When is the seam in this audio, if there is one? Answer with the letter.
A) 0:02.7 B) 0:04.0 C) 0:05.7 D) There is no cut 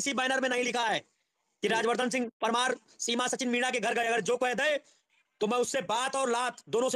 D